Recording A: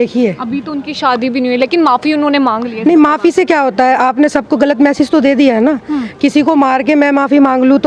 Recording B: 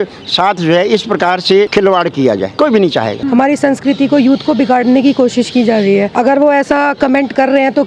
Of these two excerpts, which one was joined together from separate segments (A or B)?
B